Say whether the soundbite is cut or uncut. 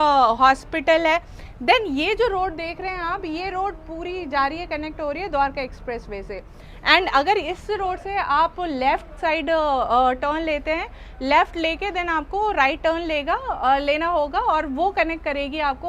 uncut